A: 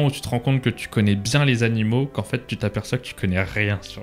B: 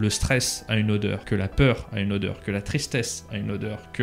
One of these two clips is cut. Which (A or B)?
B